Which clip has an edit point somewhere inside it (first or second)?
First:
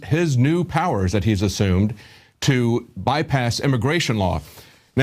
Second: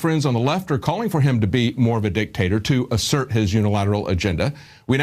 first